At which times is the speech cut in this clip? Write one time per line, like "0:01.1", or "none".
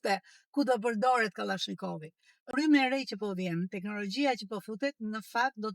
0:02.5